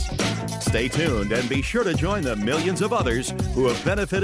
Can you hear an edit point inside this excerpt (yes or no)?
no